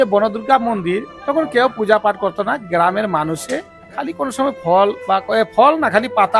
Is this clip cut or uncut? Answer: uncut